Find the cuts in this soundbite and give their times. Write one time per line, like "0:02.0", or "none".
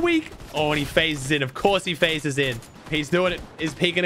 0:02.7